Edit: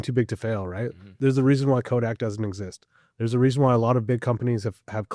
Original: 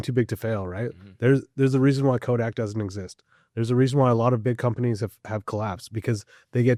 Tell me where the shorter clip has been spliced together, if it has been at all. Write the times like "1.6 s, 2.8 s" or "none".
1.1 s